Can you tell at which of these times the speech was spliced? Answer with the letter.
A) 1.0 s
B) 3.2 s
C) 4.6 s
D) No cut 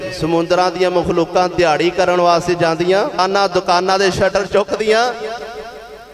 B